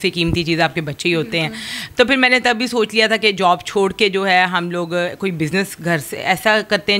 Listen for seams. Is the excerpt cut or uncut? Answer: uncut